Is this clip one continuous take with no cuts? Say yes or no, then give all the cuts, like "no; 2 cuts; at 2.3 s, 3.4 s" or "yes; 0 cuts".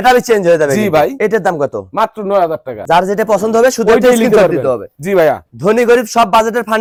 yes; 0 cuts